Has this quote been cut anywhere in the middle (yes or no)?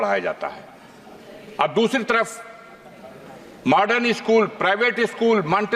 no